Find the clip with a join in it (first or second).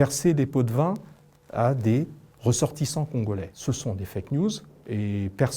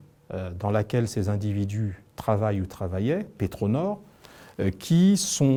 first